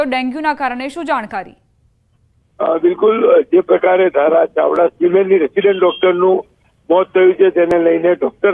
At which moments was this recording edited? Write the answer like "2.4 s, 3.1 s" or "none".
5.6 s